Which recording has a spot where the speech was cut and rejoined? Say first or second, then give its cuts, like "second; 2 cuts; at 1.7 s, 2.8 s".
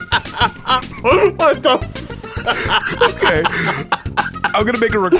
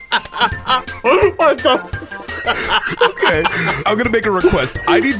second; 1 cut; at 3.8 s